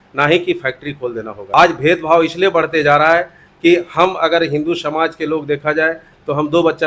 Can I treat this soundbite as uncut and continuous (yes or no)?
no